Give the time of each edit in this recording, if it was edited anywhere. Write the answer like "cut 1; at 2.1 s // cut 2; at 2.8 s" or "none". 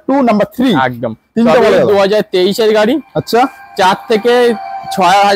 none